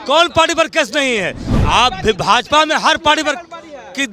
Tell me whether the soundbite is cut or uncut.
uncut